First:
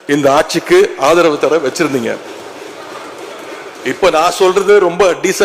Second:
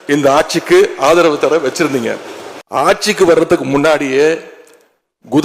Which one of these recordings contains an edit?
second; 1 cut; at 2.9 s

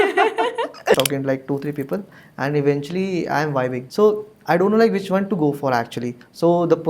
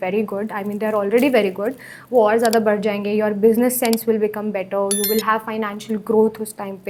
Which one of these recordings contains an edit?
first; 1 cut; at 0.9 s

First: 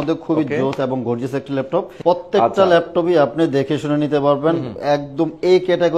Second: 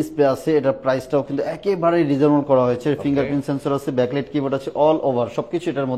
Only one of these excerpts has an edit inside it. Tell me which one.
first; 1 cut; at 1.9 s

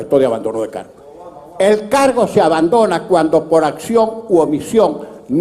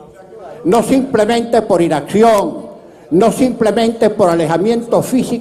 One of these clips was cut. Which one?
first; 1 cut; at 1.6 s

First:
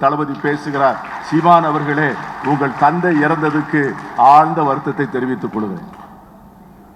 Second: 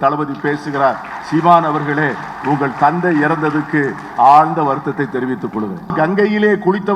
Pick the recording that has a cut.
second; 1 cut; at 5.9 s

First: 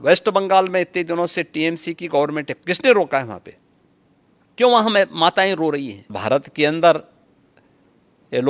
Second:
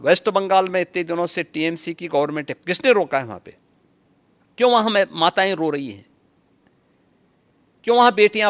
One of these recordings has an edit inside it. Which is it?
first; 1 cut; at 6.2 s

